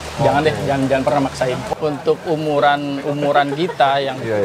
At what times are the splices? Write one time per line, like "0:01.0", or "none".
0:01.7